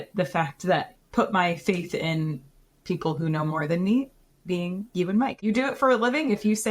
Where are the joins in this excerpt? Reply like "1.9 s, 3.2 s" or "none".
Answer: 0.9 s, 5.4 s